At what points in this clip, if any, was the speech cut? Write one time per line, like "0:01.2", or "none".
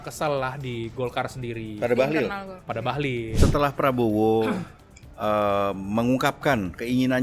0:03.3